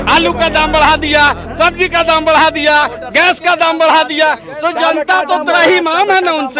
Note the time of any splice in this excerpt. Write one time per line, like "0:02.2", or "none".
none